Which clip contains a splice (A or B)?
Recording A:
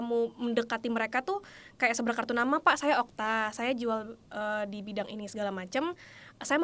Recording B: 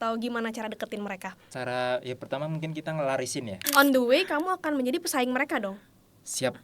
B